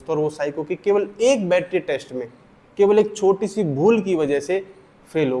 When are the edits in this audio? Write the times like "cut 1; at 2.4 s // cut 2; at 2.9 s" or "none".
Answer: none